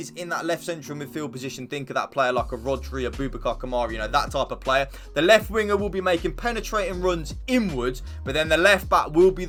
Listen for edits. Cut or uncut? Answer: uncut